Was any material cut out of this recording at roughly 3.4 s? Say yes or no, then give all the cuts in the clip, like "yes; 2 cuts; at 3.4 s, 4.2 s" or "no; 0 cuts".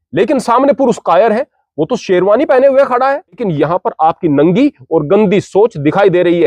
yes; 1 cut; at 3.4 s